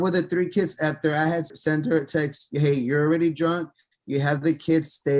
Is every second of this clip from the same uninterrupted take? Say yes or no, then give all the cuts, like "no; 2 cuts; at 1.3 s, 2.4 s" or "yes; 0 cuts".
no; 1 cut; at 1.5 s